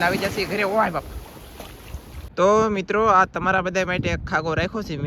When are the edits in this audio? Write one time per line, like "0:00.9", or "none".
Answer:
0:02.2